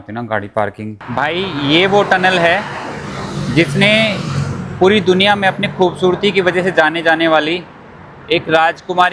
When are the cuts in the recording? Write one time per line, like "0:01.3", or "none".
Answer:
0:01.0